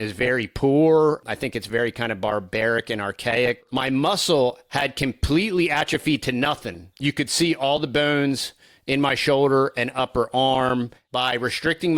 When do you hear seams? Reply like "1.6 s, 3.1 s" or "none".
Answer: 1.2 s, 3.7 s, 6.8 s, 11.0 s